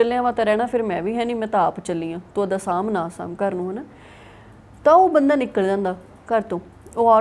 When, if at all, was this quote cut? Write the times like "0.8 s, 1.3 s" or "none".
none